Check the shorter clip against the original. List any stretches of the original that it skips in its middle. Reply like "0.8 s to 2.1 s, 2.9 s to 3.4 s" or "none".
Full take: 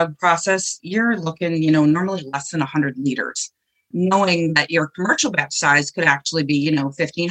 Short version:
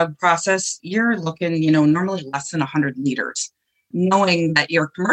none